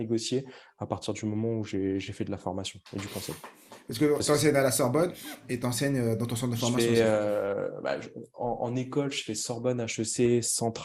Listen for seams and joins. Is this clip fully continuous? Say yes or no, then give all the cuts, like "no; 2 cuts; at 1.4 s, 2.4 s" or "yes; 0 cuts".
yes; 0 cuts